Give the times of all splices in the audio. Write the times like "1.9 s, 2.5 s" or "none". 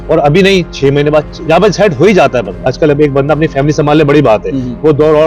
2.7 s